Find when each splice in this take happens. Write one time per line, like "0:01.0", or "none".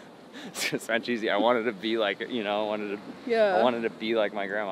none